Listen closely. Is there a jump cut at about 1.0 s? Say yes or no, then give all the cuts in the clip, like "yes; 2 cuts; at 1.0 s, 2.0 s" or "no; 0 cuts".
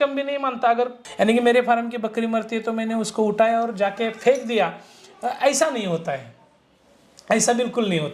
yes; 1 cut; at 1.0 s